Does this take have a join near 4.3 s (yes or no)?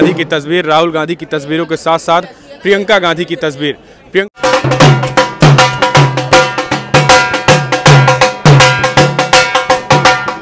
yes